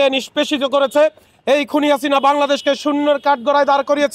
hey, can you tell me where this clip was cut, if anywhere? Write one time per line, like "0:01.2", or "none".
none